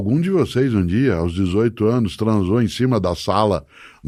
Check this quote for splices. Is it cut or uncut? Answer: uncut